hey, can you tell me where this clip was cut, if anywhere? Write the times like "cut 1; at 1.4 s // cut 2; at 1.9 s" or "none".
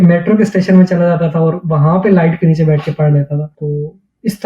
cut 1; at 3.5 s